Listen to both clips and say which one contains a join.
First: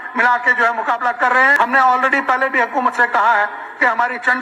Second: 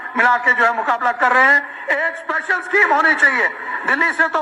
first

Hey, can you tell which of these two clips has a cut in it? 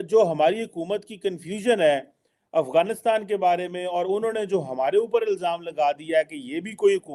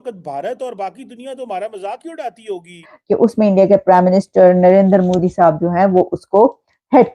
second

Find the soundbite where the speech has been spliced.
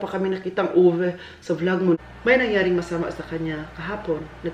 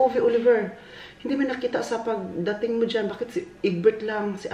first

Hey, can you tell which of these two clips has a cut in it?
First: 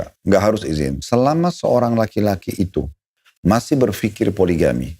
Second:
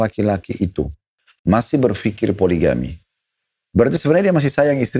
first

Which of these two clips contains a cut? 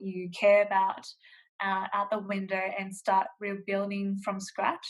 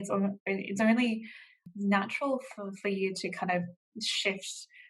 second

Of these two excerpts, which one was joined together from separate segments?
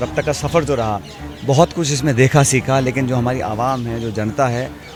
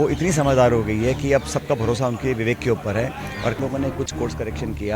second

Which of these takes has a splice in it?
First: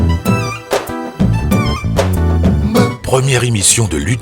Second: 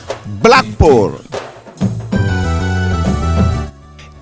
first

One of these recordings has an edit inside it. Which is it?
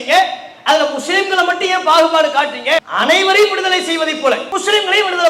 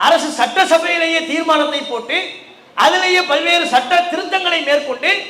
first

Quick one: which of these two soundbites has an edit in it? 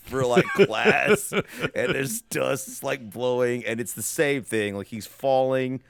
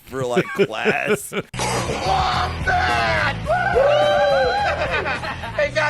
second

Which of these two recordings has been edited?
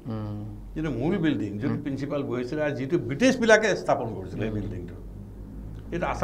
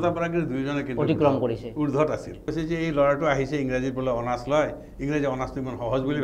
second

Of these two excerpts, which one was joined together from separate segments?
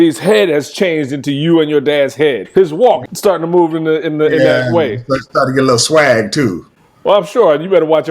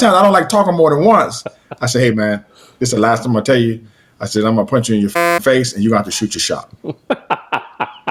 first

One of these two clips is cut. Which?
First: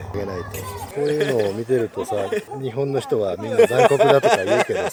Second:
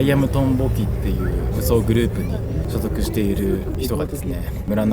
second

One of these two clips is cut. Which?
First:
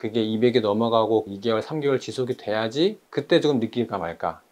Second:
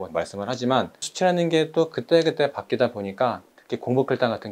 first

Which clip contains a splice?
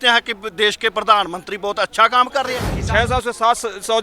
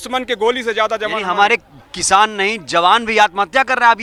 first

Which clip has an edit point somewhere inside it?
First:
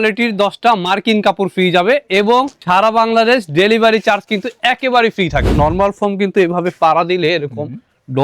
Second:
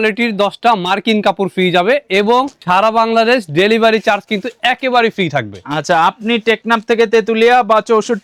first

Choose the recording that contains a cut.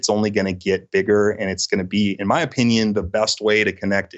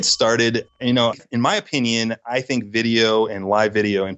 second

